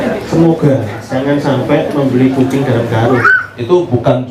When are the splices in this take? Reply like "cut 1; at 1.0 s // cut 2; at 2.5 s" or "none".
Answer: cut 1; at 3.2 s